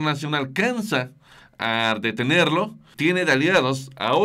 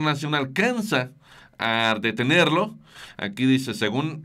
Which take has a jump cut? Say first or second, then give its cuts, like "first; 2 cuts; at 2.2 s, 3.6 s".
first; 1 cut; at 2.9 s